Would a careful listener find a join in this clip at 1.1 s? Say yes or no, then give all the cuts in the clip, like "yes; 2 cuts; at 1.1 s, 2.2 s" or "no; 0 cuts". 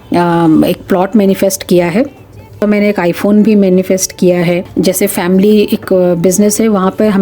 no; 2 cuts; at 2.6 s, 4.7 s